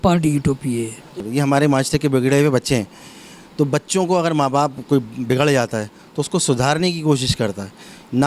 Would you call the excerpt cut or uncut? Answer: cut